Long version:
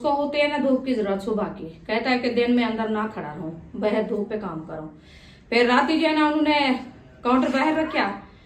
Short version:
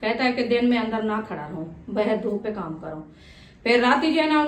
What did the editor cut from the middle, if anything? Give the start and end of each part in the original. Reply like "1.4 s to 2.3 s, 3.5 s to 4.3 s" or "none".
none